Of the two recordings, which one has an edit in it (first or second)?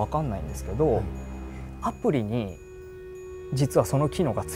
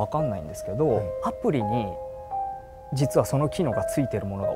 second